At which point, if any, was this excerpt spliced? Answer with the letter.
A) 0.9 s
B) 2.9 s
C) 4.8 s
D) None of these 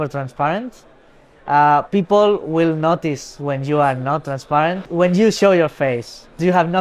C